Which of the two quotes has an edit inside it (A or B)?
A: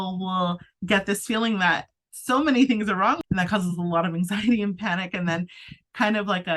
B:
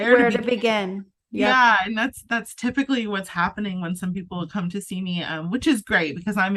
A